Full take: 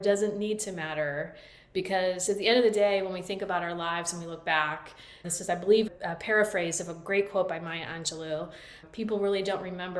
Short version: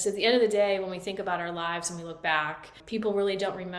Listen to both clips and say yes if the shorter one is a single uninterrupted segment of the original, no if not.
no